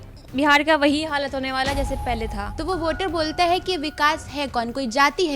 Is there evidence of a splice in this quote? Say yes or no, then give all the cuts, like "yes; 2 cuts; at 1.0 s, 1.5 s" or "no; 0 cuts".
yes; 1 cut; at 2.5 s